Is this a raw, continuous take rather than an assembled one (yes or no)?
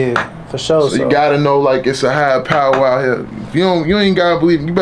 yes